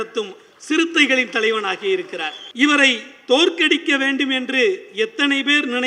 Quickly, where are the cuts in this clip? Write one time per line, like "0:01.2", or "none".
0:02.4